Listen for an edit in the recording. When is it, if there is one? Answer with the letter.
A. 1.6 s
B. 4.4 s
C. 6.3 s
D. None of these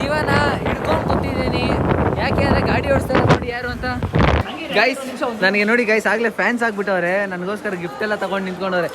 B